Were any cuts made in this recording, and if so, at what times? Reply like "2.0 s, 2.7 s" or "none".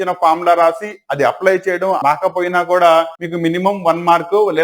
2.0 s, 3.2 s